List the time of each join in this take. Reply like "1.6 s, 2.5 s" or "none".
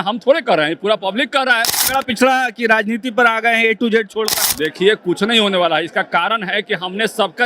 1.7 s, 4.4 s